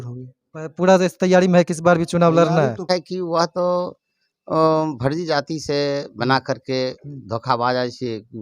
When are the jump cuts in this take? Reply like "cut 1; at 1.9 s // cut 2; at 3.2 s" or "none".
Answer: cut 1; at 2.9 s